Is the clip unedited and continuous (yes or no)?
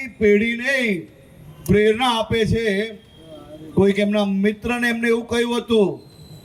yes